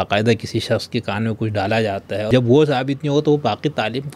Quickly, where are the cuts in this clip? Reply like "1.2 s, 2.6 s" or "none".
2.3 s